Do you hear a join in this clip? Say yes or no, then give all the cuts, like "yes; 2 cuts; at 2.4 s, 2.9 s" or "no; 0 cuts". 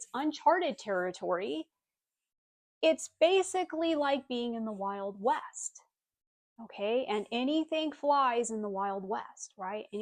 no; 0 cuts